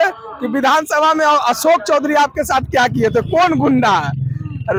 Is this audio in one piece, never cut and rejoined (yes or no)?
yes